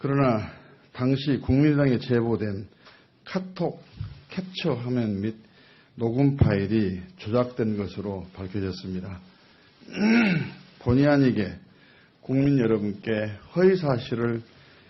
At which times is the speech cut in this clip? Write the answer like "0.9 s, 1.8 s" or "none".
1.1 s